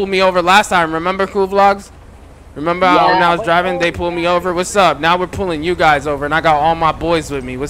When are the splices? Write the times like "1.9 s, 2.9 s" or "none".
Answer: none